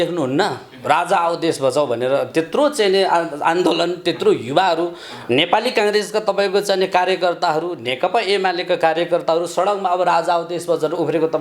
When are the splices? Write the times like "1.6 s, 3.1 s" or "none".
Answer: none